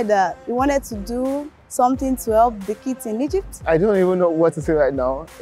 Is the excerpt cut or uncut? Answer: cut